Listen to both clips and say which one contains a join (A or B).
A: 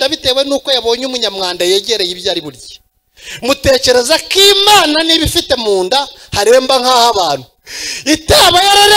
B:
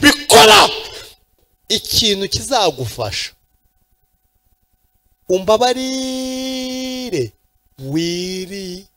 B